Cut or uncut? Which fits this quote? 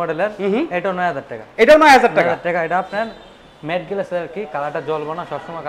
uncut